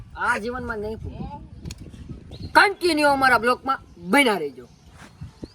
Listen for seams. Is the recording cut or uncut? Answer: cut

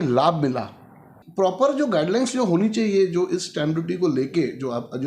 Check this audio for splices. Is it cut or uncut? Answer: cut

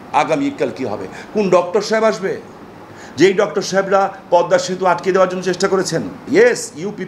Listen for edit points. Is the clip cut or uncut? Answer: cut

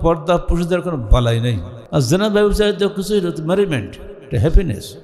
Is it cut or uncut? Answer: cut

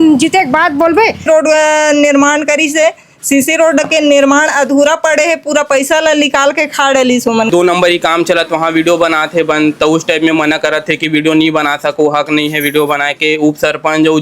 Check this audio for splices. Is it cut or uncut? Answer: cut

